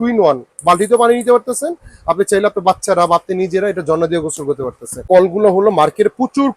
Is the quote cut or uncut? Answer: cut